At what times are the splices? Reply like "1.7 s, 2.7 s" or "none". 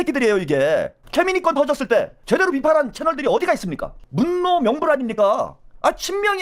1.0 s, 4.0 s